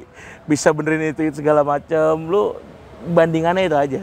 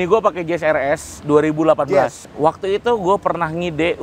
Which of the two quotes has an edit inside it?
second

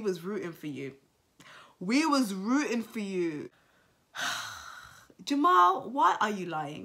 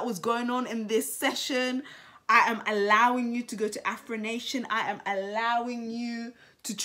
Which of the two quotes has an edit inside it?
first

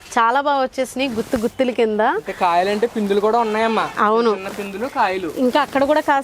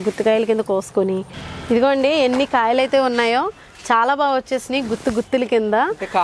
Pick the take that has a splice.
second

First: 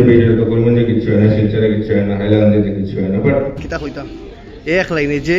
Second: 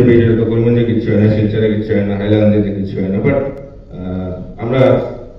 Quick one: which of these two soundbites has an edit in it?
first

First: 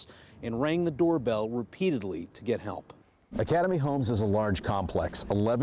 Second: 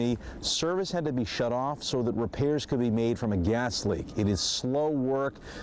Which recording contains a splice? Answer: first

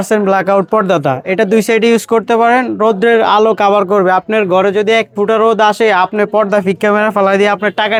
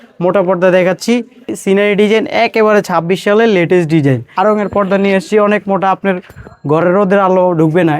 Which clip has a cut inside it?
second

